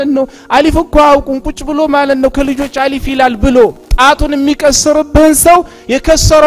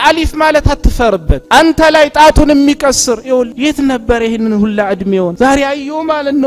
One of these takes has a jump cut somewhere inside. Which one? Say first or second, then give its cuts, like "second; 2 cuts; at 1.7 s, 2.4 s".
second; 3 cuts; at 1.4 s, 3.5 s, 5.3 s